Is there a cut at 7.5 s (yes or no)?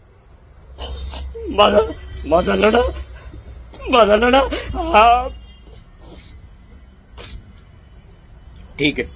no